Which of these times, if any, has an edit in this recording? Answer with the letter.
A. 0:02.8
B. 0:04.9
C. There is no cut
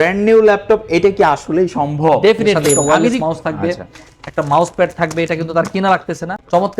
A